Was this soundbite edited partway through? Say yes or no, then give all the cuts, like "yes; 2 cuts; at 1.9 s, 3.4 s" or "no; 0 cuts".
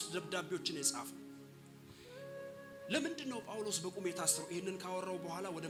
no; 0 cuts